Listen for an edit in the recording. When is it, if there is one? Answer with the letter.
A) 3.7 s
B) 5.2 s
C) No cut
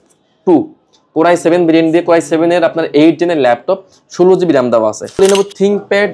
B